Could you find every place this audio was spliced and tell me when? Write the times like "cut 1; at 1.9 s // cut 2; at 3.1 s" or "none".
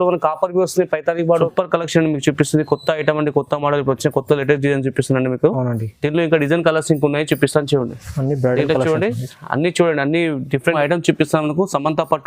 cut 1; at 1.5 s // cut 2; at 10.7 s